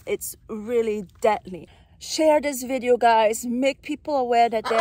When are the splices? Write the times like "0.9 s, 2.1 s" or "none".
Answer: 1.6 s